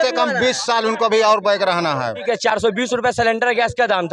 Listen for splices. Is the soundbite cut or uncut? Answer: cut